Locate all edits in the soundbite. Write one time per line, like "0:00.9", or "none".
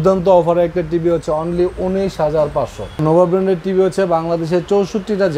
0:03.0